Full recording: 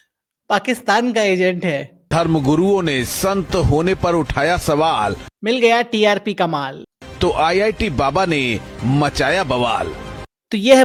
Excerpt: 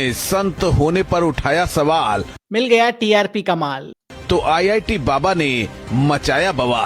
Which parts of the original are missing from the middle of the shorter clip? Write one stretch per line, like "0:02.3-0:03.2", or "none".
none